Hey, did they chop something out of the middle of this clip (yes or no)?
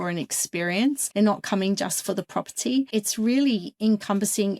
yes